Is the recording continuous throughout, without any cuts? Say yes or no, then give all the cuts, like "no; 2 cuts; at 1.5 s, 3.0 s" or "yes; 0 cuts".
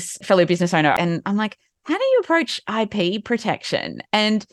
no; 1 cut; at 0.9 s